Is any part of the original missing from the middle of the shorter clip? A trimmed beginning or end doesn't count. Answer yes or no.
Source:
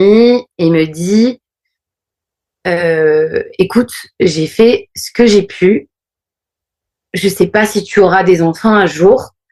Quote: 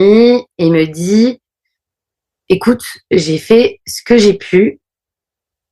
yes